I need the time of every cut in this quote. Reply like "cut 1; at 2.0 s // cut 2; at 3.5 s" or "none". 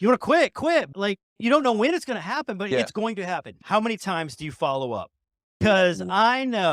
cut 1; at 3.5 s // cut 2; at 5.6 s